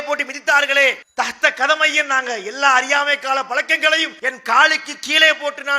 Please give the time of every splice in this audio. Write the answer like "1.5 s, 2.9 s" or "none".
1.0 s, 4.2 s